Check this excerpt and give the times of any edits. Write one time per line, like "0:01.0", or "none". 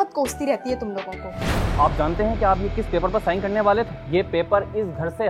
0:01.6
0:04.0